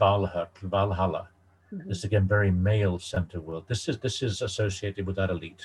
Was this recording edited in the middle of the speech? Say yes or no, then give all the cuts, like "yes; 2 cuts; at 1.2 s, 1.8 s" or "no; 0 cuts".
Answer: no; 0 cuts